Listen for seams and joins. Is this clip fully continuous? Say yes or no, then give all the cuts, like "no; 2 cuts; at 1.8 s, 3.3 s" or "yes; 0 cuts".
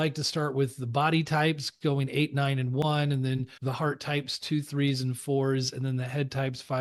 yes; 0 cuts